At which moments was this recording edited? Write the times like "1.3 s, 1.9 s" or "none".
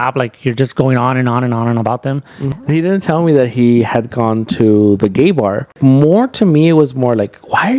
2.5 s, 5.7 s